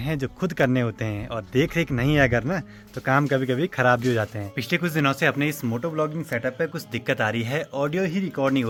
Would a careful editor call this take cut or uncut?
uncut